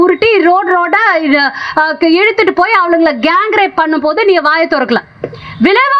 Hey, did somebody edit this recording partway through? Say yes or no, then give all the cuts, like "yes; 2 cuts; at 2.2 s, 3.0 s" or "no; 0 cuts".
no; 0 cuts